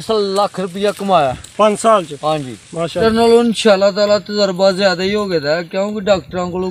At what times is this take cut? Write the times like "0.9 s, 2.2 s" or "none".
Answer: 2.9 s